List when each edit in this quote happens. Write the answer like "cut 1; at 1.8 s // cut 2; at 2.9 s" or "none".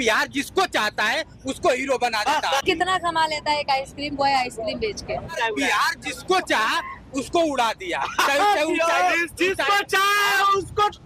cut 1; at 2.6 s // cut 2; at 5.3 s